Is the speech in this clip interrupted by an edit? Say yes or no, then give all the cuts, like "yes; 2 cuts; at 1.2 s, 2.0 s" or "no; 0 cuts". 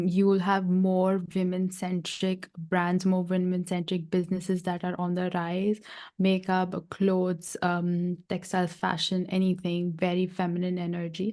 no; 0 cuts